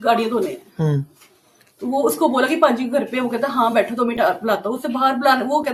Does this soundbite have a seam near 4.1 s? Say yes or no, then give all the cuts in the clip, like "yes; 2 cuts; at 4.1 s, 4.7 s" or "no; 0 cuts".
no; 0 cuts